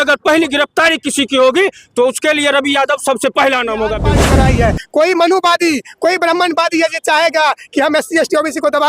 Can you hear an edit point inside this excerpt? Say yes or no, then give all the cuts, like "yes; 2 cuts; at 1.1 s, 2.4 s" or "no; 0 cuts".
yes; 1 cut; at 4.2 s